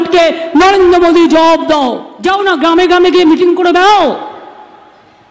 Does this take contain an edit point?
yes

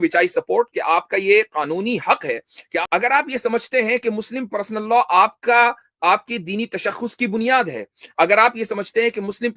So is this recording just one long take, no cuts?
no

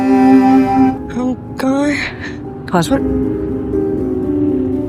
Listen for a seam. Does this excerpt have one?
yes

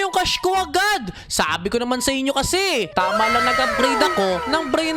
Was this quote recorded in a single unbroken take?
yes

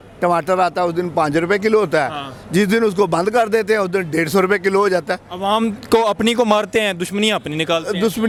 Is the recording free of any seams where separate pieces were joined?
yes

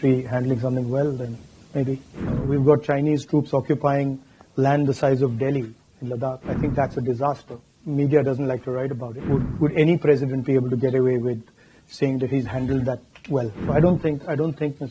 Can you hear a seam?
yes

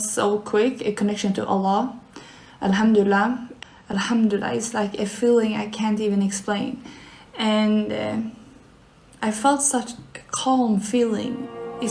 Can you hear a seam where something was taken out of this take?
yes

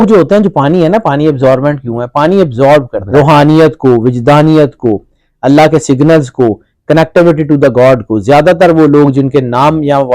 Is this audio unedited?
no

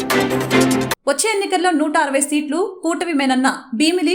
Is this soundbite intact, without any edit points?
no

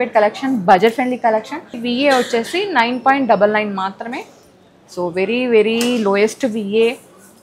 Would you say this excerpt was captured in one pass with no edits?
no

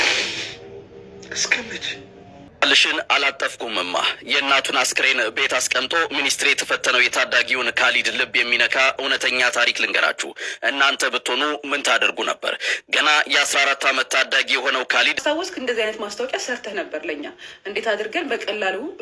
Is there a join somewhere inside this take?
yes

